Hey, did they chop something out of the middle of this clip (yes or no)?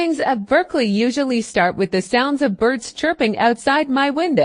no